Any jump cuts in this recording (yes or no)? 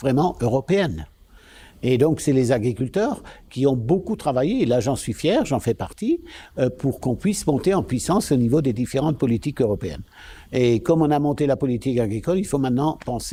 no